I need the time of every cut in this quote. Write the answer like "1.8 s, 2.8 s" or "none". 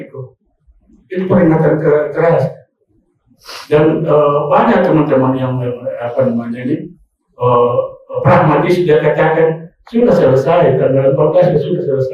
none